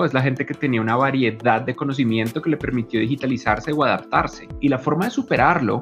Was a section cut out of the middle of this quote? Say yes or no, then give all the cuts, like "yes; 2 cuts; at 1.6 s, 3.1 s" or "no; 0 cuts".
yes; 1 cut; at 4.5 s